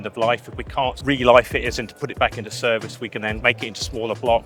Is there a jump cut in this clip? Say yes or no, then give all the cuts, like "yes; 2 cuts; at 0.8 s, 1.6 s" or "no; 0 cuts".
yes; 2 cuts; at 1.0 s, 3.4 s